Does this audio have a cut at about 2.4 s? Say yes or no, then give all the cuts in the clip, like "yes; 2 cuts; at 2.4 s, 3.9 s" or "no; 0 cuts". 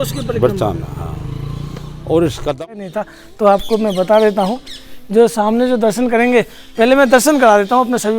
yes; 1 cut; at 2.4 s